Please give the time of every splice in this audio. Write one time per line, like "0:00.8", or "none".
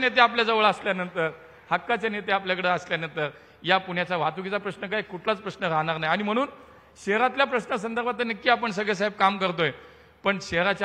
none